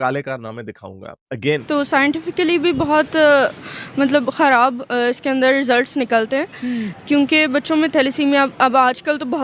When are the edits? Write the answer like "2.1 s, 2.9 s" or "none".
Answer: 1.6 s